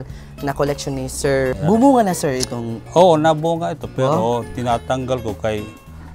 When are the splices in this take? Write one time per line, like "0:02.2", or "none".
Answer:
0:01.5